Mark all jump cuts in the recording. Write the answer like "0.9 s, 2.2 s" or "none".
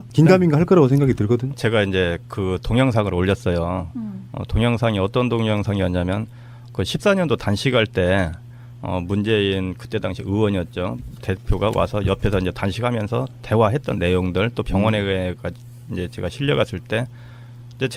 none